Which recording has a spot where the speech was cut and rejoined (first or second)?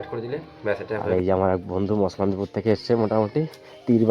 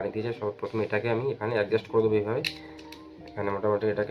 first